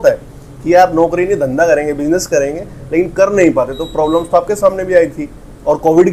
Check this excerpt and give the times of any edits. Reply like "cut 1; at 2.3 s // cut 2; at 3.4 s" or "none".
none